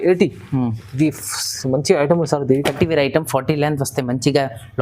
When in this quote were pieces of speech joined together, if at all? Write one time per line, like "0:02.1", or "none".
0:02.7